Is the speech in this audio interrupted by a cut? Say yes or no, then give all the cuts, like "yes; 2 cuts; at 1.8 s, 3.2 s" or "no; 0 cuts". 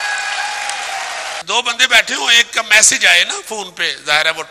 yes; 1 cut; at 1.4 s